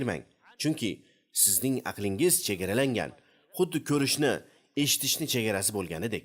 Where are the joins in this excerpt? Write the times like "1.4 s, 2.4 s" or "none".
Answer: none